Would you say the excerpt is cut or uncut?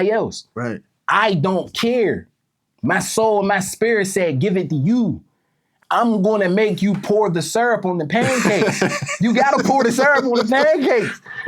cut